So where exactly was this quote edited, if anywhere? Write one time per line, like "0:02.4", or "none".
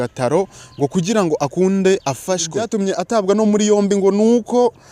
0:02.5